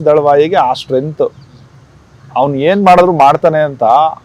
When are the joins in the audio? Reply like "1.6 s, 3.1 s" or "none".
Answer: none